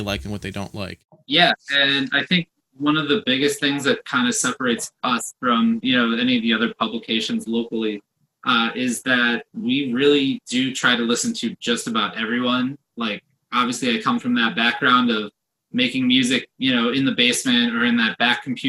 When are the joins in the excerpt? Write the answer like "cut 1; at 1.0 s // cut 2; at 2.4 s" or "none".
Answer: cut 1; at 1.1 s